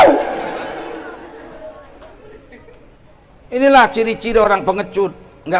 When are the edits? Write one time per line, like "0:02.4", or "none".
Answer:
0:03.1